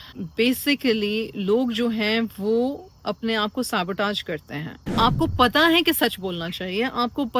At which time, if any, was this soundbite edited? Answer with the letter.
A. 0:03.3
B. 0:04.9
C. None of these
B